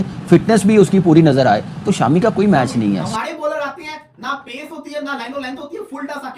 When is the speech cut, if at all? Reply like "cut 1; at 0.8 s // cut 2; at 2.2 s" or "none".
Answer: cut 1; at 3.1 s